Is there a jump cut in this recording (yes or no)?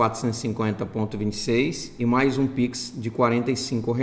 yes